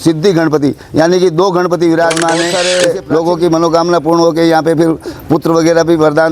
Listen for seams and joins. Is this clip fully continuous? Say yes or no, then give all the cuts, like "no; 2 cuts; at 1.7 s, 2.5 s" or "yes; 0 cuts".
no; 1 cut; at 2.7 s